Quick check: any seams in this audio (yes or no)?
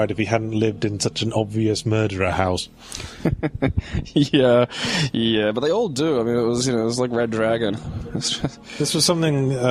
yes